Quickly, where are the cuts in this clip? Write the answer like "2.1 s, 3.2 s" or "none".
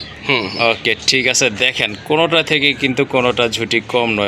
none